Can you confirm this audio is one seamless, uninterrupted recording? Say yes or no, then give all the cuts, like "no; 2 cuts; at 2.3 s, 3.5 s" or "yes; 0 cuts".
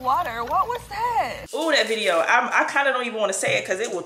no; 1 cut; at 1.4 s